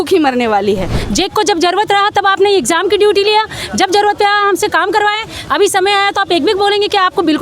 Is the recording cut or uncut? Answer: cut